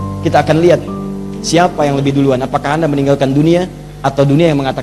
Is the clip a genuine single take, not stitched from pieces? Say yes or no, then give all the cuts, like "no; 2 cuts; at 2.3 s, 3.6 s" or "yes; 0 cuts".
yes; 0 cuts